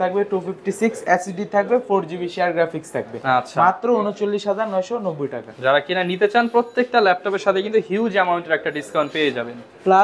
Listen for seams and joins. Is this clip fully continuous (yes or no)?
yes